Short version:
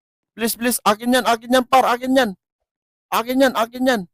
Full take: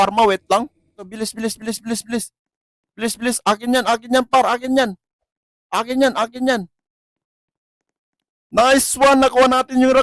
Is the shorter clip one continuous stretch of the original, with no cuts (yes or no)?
yes